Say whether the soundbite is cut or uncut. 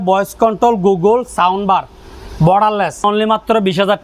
cut